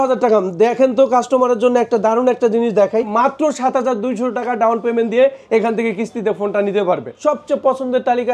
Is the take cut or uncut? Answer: cut